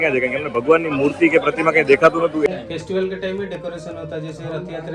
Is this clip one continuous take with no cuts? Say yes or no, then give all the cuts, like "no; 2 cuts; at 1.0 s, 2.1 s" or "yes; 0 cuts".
no; 1 cut; at 2.5 s